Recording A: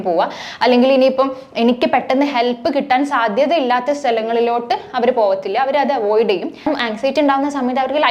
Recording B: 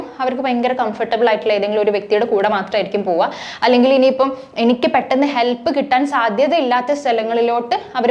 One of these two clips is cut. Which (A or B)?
A